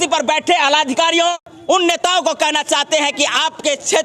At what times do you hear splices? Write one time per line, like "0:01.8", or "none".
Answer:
0:01.3